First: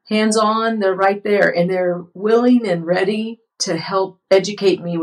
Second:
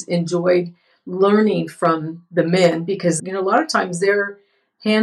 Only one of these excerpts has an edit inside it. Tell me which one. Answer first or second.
second